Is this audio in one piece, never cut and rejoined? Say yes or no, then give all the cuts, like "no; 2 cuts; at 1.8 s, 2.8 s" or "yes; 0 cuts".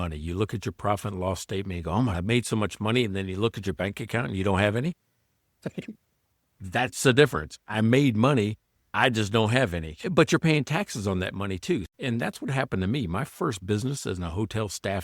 no; 2 cuts; at 2.2 s, 11.9 s